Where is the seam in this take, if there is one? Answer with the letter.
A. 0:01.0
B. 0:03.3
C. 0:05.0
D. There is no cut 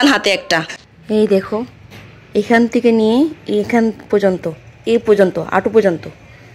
A